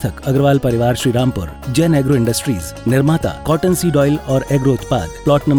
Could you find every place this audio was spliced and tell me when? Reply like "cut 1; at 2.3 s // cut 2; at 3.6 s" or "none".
none